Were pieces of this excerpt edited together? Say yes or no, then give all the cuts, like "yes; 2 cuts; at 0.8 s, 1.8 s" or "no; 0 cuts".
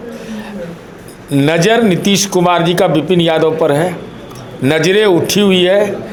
no; 0 cuts